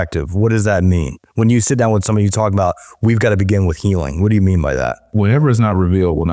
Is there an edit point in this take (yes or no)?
yes